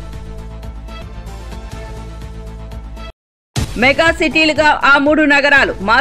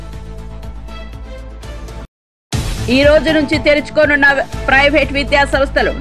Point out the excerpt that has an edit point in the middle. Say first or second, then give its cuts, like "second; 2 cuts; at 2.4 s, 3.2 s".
second; 1 cut; at 1.0 s